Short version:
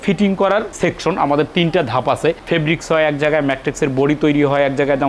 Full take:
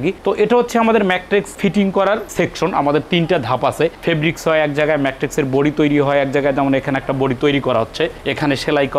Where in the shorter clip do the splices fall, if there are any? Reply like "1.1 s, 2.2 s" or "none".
none